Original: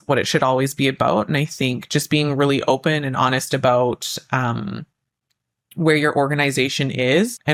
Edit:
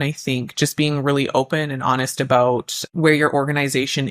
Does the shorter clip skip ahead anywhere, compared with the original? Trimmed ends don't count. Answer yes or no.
yes